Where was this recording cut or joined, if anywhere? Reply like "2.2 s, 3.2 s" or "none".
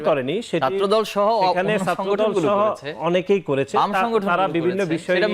none